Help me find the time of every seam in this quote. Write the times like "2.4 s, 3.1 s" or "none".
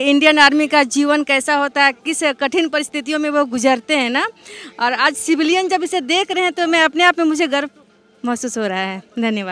none